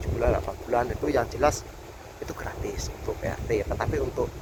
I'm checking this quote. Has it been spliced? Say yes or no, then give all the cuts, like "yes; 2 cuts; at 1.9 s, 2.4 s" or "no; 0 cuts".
no; 0 cuts